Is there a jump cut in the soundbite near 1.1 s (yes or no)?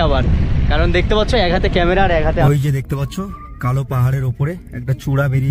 no